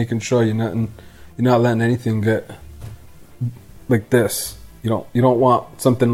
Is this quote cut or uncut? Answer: uncut